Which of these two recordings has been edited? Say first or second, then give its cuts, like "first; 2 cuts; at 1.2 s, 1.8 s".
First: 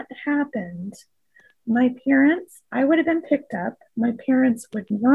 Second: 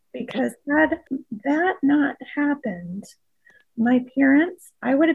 second; 1 cut; at 1.0 s